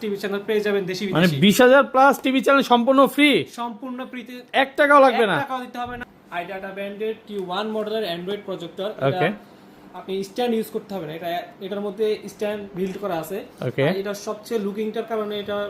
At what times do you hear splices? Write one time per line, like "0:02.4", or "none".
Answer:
0:06.0